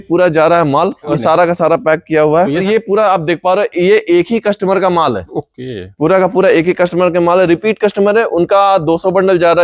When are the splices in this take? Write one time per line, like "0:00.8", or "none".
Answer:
0:01.2
0:02.6